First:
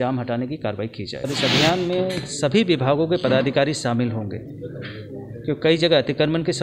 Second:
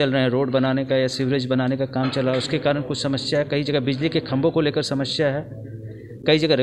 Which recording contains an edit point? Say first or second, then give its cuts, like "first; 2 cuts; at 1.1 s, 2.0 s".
first; 1 cut; at 1.3 s